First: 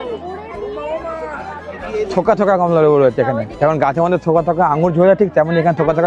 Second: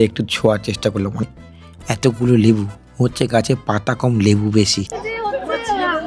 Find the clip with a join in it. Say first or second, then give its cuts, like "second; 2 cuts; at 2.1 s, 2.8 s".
second; 2 cuts; at 1.2 s, 4.9 s